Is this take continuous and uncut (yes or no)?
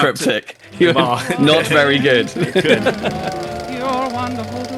no